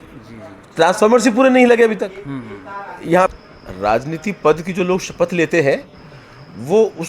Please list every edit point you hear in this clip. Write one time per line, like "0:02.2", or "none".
0:03.3